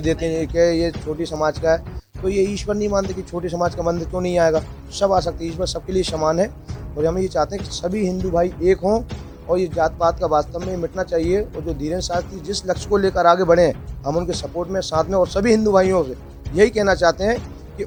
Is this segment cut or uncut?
uncut